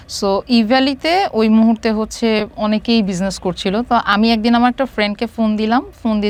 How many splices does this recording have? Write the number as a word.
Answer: zero